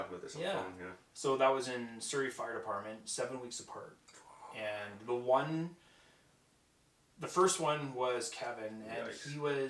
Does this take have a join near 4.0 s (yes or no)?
no